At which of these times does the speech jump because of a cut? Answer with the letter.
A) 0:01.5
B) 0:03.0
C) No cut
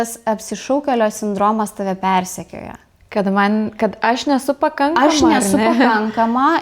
C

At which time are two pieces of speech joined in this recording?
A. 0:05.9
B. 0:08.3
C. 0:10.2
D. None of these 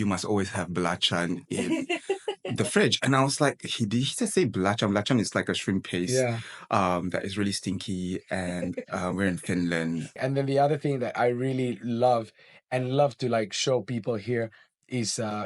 C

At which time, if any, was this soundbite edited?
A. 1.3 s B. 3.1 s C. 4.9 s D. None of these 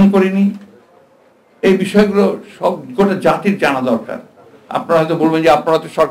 D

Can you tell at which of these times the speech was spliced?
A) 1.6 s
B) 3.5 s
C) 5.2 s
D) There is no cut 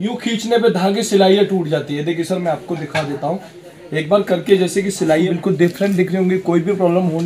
C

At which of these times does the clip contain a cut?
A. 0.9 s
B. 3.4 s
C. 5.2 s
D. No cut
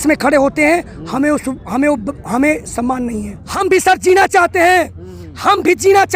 B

